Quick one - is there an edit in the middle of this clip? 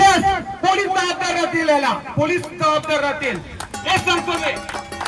no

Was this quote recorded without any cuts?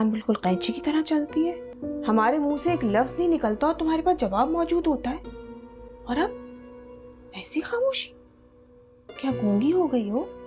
no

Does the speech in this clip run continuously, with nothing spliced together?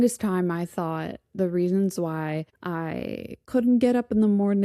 yes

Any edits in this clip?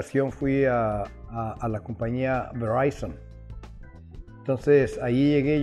yes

